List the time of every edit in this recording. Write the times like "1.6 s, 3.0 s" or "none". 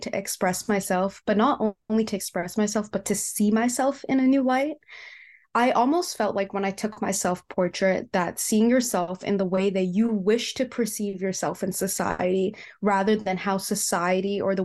none